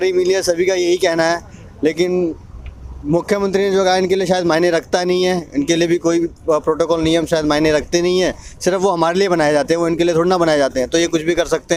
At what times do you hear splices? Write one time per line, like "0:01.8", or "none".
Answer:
none